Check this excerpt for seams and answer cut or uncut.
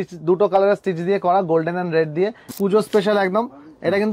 cut